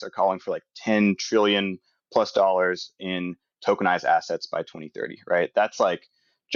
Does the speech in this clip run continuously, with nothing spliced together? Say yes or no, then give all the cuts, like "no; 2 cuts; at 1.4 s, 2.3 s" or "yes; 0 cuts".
yes; 0 cuts